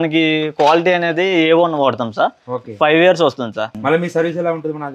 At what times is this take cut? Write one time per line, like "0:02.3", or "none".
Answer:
0:03.7